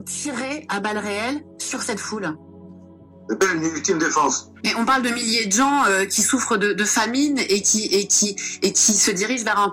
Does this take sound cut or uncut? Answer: cut